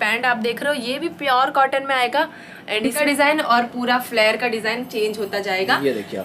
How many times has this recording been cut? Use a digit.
1